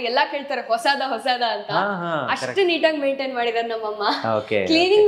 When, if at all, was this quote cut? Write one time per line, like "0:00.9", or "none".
none